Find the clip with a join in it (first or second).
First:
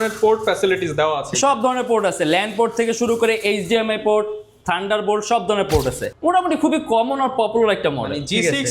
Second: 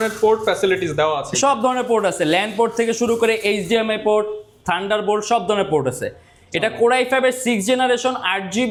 first